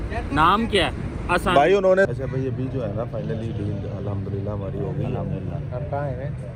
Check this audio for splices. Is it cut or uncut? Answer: cut